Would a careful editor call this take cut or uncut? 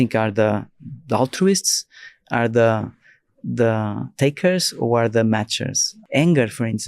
cut